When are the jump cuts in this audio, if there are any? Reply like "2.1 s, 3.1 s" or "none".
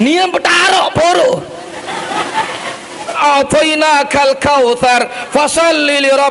3.2 s